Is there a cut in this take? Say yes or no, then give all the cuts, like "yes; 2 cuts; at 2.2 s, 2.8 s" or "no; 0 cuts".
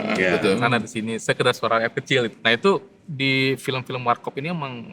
yes; 1 cut; at 2.3 s